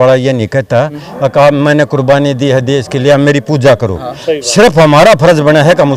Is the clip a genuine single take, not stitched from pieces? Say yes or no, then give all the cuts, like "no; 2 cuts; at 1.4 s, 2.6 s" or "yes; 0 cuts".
yes; 0 cuts